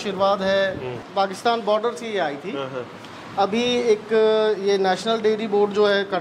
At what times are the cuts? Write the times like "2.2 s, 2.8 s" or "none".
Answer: 1.0 s